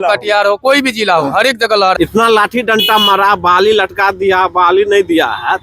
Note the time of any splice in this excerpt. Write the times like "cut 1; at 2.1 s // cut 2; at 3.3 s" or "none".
cut 1; at 2.0 s